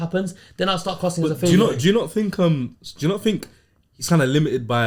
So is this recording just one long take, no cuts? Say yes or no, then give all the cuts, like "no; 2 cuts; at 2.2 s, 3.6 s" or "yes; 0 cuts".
yes; 0 cuts